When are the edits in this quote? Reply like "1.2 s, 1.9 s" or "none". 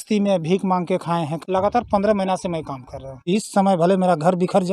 1.4 s, 3.3 s